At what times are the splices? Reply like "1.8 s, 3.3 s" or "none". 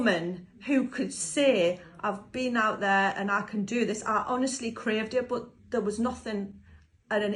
none